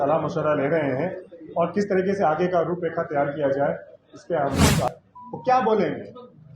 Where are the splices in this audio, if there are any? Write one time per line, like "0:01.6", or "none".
0:04.9